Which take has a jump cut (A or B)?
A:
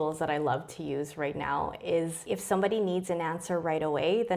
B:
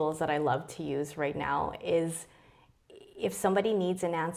A